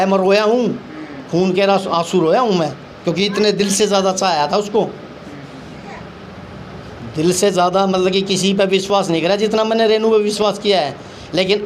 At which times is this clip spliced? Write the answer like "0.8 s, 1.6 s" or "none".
none